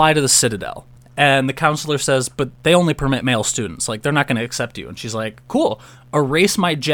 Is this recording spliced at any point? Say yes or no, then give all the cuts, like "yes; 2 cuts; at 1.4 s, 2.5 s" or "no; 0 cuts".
yes; 1 cut; at 2.4 s